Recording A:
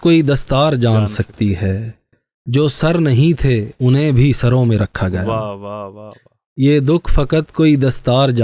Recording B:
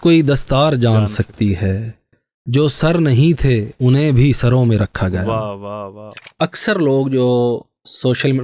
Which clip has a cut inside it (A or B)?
B